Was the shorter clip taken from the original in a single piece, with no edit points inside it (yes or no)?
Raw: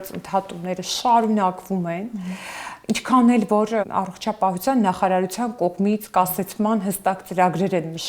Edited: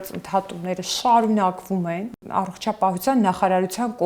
no